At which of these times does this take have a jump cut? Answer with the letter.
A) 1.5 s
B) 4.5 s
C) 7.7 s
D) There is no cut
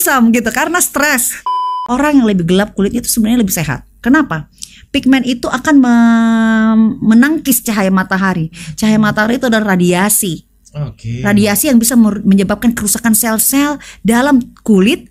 A